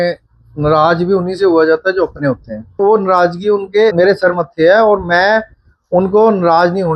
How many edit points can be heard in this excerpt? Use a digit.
2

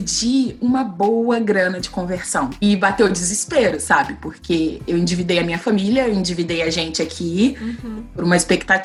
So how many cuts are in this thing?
0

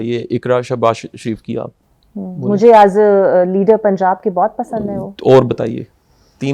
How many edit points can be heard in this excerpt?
0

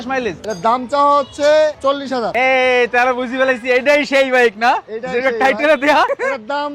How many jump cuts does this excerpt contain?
0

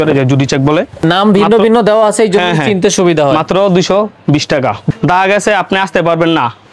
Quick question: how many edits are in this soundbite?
2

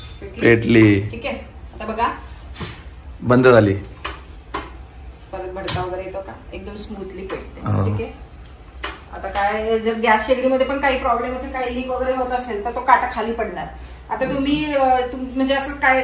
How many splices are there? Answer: 0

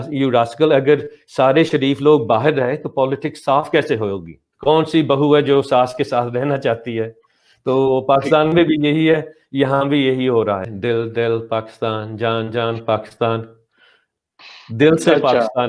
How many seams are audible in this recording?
2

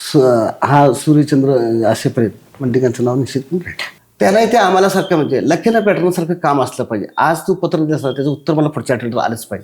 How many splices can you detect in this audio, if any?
1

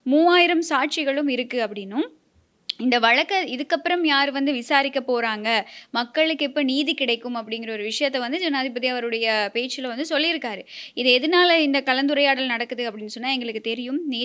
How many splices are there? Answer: 0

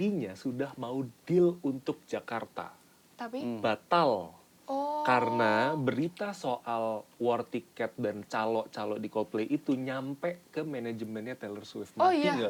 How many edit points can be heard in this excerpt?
0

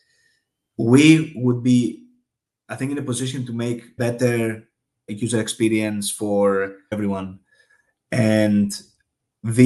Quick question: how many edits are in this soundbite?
3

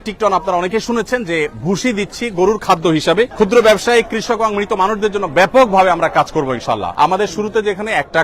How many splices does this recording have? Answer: 2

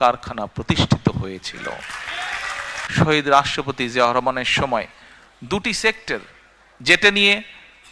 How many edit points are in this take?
1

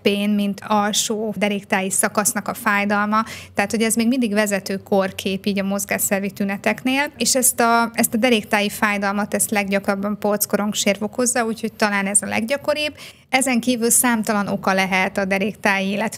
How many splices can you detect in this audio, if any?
0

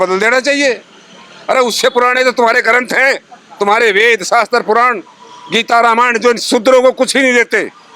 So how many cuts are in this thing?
0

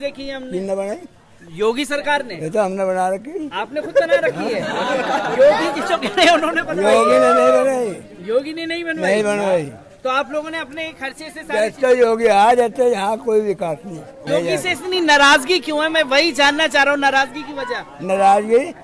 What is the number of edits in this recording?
1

